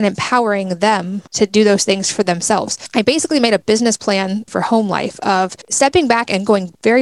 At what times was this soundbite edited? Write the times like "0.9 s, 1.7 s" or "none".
1.2 s, 2.8 s, 4.5 s, 5.6 s